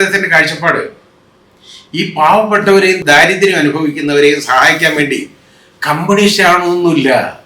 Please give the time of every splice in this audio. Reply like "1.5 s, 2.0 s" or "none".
3.0 s

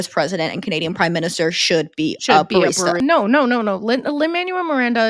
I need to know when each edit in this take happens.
3.0 s

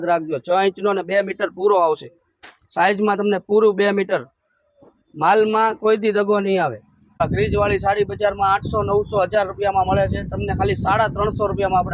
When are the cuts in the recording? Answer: 7.2 s

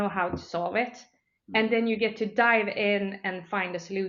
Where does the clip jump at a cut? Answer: none

